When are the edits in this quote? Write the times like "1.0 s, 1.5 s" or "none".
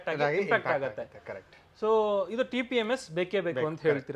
none